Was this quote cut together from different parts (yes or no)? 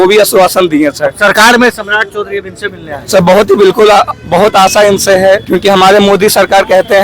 yes